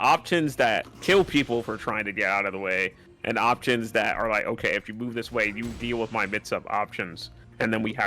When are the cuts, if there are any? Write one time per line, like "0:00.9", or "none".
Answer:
0:00.9

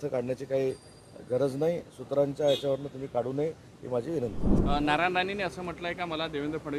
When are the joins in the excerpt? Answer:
0:04.5

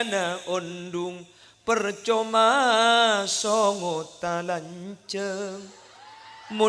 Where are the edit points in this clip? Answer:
none

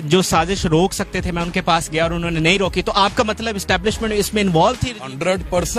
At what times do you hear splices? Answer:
none

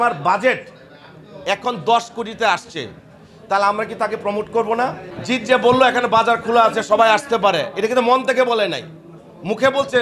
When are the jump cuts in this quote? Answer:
0:05.1

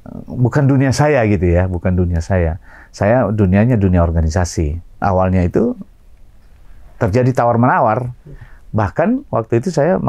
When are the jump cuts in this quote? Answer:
0:05.0

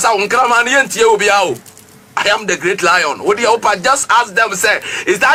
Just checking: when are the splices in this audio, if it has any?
none

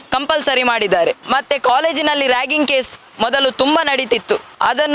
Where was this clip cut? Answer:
0:01.2

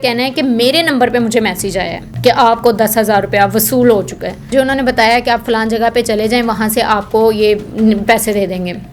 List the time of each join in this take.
0:02.0
0:04.5

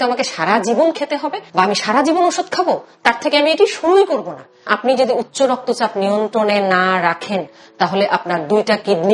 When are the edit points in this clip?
0:01.4
0:04.7

